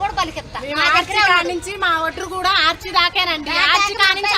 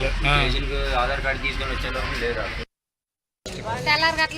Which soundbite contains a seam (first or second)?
second